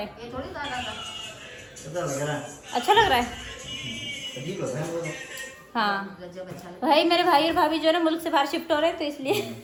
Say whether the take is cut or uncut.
uncut